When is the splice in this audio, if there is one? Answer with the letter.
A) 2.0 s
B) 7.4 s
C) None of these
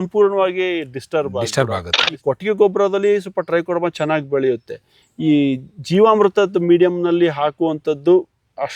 A